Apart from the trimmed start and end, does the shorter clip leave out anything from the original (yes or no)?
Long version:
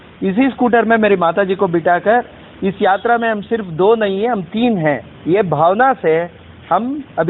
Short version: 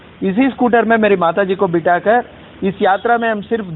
no